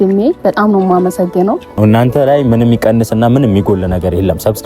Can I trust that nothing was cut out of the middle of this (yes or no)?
no